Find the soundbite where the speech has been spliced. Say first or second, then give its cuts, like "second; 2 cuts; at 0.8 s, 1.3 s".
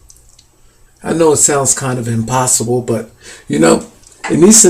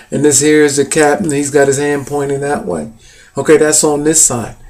first; 1 cut; at 1.8 s